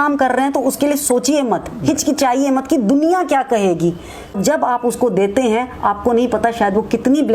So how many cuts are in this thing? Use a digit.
1